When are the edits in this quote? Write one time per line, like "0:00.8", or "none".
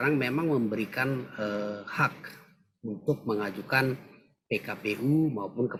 none

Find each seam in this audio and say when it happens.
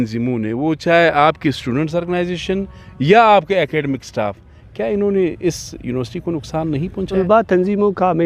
0:07.2

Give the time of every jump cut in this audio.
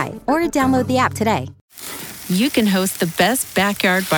0:01.6

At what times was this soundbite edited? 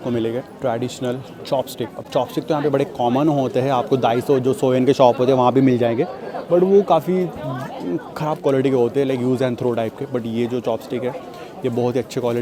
none

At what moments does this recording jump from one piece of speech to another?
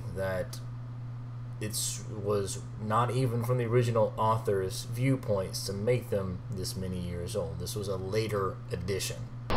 0:02.4

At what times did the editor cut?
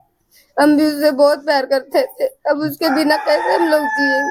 none

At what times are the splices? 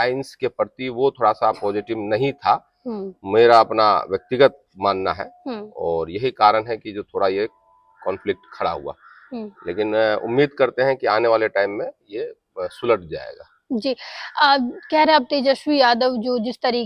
none

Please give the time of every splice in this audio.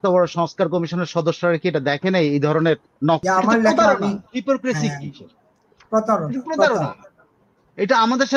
0:03.2

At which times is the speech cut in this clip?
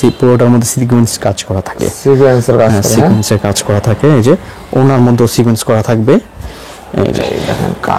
none

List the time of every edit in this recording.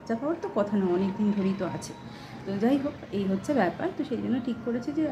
none

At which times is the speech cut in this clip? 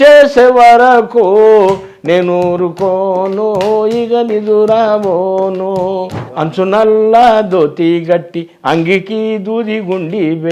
0:06.2

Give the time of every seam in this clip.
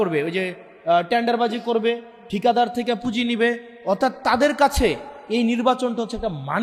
none

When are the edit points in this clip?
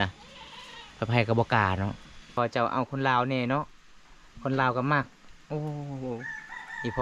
0:02.4

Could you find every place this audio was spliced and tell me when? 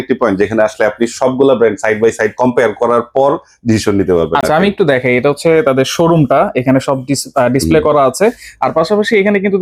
none

